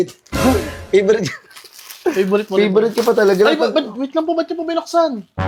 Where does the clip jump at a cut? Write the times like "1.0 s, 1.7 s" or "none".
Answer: none